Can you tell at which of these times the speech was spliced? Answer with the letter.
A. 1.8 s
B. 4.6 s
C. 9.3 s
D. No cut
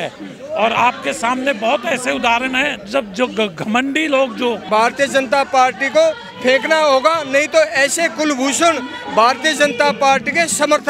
B